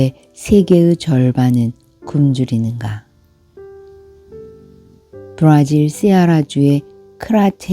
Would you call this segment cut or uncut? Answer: cut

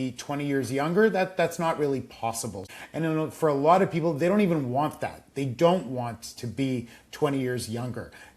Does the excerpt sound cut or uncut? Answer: cut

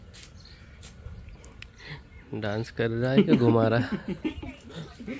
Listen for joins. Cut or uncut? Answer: uncut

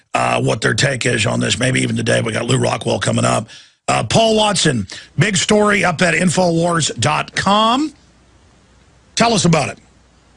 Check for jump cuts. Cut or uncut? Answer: cut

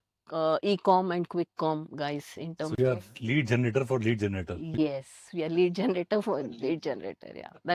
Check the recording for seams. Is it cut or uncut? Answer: uncut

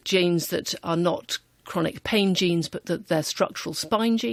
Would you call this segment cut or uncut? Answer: uncut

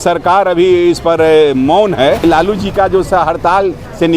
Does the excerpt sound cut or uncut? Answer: cut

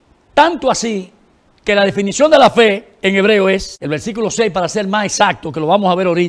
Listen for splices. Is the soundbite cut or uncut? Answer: cut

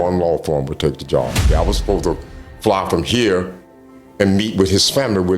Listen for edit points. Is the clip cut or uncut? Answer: cut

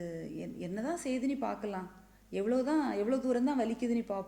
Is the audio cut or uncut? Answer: uncut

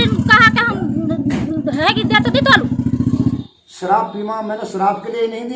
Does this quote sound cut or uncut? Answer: cut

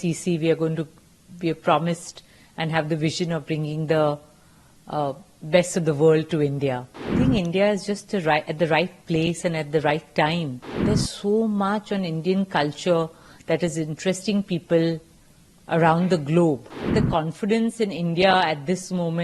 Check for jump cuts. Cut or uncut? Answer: cut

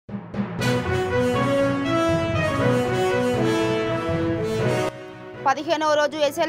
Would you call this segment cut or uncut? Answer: cut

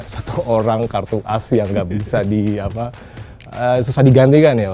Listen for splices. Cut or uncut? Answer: uncut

